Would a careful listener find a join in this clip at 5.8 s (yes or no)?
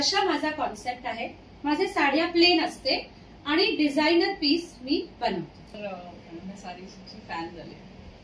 yes